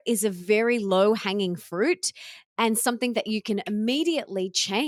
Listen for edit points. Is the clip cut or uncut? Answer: uncut